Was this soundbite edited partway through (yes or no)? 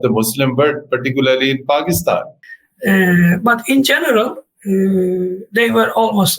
yes